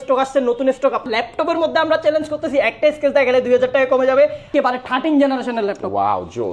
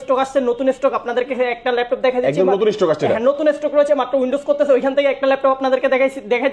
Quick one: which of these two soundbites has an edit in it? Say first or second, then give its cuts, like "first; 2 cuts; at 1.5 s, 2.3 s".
first; 2 cuts; at 1.1 s, 4.5 s